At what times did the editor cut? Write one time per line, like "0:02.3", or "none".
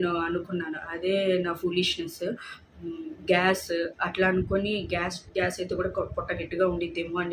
none